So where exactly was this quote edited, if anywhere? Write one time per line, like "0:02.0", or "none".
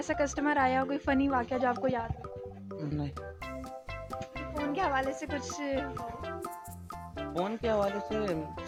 none